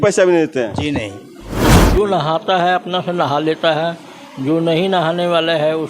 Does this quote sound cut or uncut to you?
cut